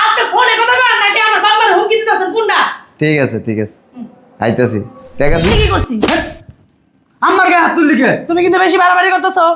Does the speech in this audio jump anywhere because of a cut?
yes; 1 cut; at 5.5 s

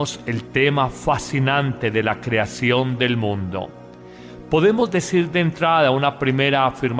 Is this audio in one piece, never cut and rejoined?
yes; 0 cuts

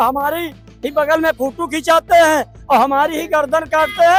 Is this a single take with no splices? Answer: yes; 0 cuts

